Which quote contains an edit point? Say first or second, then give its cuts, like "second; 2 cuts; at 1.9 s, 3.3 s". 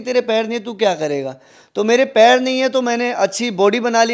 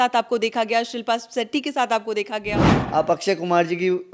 second; 1 cut; at 2.8 s